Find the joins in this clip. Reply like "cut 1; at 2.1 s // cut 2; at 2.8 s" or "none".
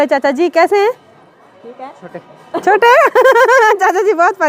none